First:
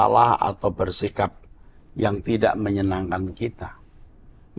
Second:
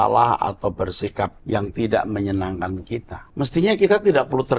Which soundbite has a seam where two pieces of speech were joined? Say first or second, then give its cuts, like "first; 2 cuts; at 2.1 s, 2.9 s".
second; 2 cuts; at 1.4 s, 3.2 s